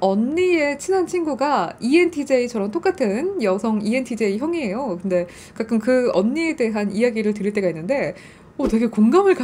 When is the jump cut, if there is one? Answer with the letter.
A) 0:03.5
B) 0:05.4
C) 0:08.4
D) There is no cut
D